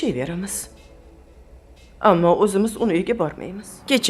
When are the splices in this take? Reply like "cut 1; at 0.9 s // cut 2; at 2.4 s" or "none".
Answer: cut 1; at 3.2 s